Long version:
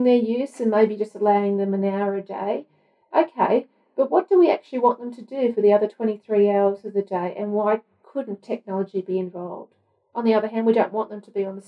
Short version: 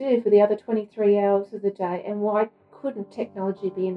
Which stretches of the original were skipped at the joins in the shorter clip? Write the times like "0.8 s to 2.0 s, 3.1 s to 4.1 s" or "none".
none